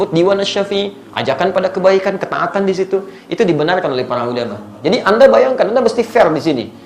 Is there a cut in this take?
yes; 1 cut; at 4.7 s

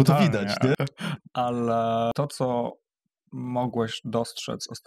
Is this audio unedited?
no; 2 cuts; at 0.8 s, 2.1 s

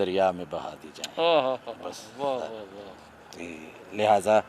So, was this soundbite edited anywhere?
no; 0 cuts

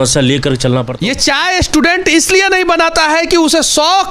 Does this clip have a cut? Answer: yes; 1 cut; at 0.9 s

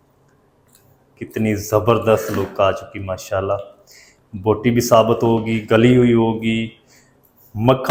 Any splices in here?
no; 0 cuts

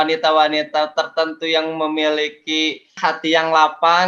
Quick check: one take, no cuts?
yes; 0 cuts

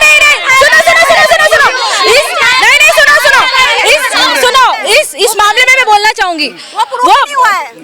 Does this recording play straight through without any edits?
yes; 0 cuts

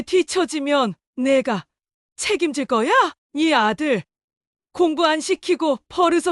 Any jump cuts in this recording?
yes; 1 cut; at 3.2 s

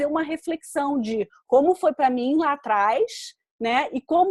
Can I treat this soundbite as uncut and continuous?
yes; 0 cuts

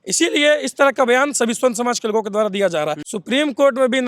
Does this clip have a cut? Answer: yes; 1 cut; at 3.0 s

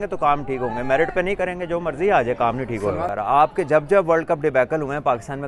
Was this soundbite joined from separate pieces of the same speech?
yes; 1 cut; at 3.1 s

